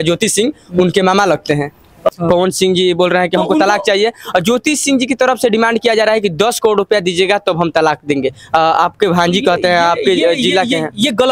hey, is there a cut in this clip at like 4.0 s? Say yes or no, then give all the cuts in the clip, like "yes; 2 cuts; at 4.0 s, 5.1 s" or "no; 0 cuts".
no; 1 cut; at 2.1 s